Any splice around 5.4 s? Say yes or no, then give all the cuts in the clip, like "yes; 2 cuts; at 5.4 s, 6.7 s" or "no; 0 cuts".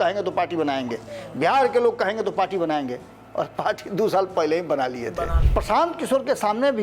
yes; 1 cut; at 5.4 s